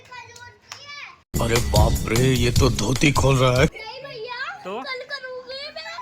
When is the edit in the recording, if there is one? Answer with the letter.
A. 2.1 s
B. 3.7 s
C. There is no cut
B